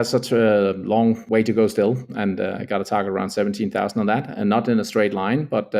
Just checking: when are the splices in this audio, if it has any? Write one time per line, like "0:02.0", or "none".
0:01.2